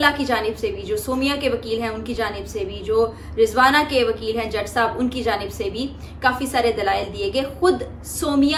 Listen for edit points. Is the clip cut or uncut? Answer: uncut